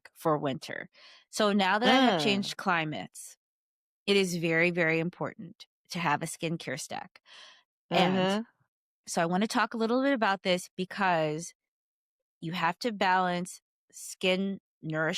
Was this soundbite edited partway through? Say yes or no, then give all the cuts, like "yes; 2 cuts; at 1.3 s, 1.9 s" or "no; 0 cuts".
no; 0 cuts